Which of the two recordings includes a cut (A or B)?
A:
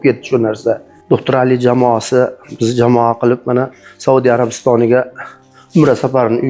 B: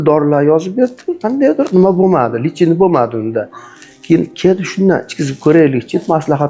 A